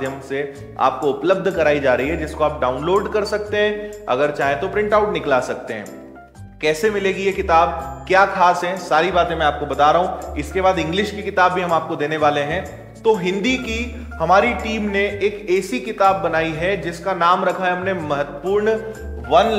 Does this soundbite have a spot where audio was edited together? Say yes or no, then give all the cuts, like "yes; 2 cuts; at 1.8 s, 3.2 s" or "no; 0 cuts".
no; 0 cuts